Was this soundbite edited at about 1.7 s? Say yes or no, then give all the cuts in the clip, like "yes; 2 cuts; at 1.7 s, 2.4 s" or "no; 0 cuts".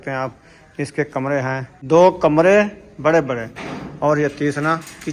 yes; 1 cut; at 1.7 s